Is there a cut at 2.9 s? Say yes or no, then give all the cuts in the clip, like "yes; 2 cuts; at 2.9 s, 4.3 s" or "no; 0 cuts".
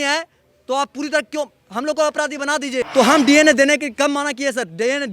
yes; 1 cut; at 2.9 s